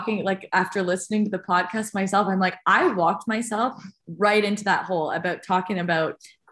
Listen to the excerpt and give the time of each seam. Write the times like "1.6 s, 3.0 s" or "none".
none